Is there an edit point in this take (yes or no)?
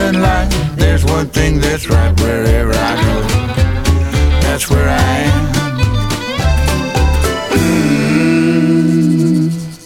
no